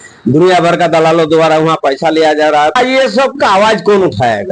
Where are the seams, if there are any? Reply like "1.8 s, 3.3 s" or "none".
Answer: 2.8 s